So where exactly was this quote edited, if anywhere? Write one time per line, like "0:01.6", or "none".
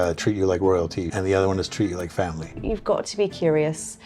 0:01.1
0:02.6